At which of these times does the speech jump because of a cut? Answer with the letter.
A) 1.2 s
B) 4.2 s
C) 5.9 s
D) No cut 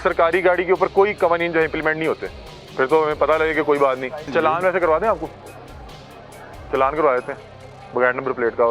B